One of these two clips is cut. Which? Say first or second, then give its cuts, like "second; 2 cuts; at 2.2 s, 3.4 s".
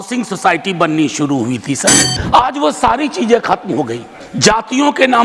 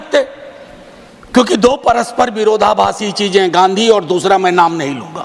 first; 1 cut; at 2.2 s